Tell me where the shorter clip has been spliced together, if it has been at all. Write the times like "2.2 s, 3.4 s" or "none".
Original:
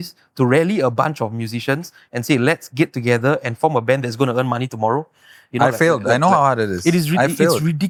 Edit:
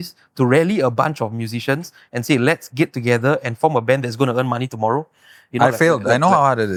none